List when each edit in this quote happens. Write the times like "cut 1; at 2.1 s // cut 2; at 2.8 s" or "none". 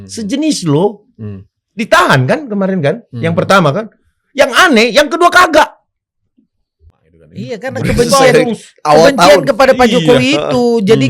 cut 1; at 7.5 s